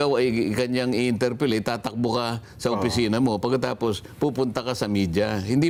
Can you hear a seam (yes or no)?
no